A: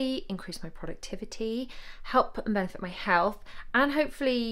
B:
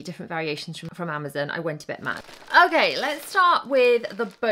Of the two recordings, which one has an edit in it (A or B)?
B